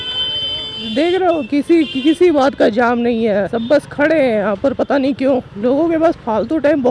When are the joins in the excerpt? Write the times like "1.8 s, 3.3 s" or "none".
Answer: none